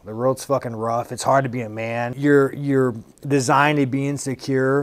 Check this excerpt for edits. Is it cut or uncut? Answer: cut